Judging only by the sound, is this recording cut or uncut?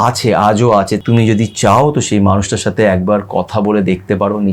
cut